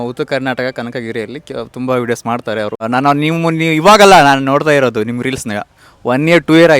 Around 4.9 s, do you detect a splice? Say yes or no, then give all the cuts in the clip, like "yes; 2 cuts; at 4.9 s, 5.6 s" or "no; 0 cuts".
no; 1 cut; at 2.8 s